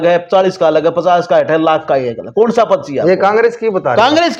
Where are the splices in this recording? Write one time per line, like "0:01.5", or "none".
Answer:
none

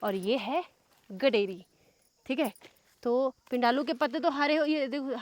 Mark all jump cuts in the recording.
none

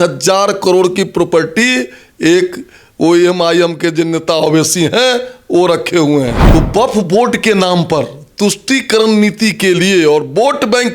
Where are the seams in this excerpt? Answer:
0:06.4

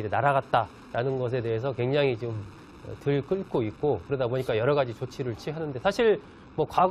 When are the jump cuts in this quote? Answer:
none

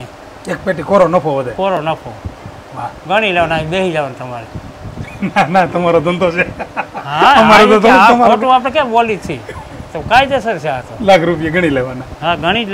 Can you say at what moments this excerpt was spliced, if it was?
none

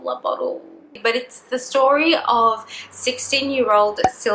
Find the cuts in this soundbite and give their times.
0:01.0

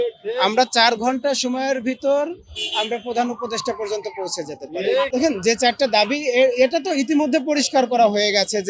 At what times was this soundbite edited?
none

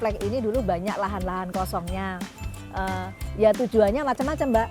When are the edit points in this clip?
none

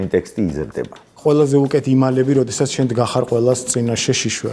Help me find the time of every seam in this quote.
0:01.2

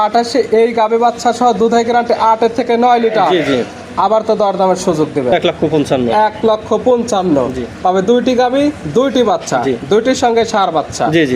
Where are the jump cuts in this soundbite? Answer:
0:05.3

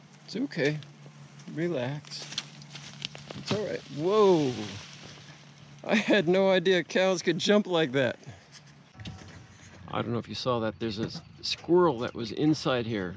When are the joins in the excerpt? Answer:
0:09.0

